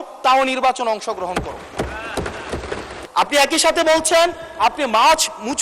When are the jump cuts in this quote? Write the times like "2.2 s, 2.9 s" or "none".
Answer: 2.9 s